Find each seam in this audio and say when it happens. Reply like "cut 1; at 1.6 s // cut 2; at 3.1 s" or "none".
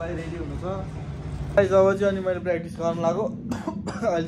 cut 1; at 1.6 s

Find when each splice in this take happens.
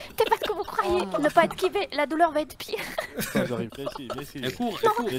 cut 1; at 3.7 s

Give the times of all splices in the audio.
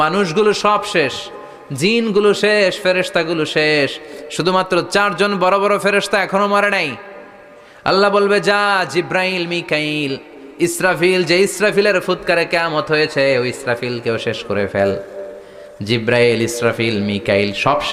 none

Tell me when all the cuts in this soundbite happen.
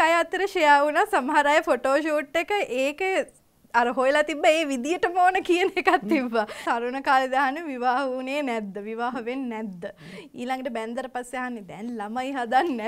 cut 1; at 6.6 s

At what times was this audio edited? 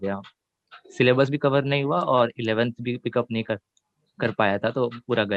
none

